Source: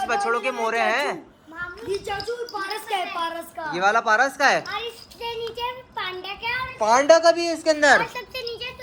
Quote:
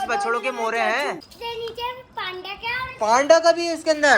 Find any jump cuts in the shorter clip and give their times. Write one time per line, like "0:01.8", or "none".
0:01.3